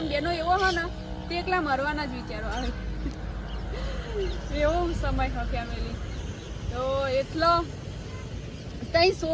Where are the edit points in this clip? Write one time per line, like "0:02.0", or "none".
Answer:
none